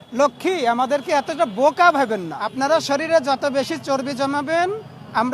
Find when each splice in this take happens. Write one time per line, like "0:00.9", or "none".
0:02.4